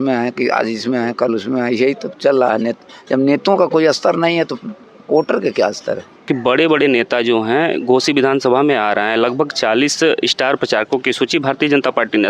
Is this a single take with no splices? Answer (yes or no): no